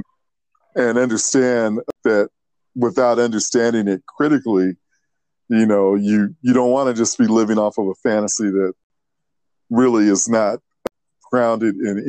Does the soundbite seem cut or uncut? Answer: cut